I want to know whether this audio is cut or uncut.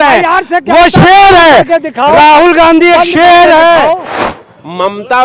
cut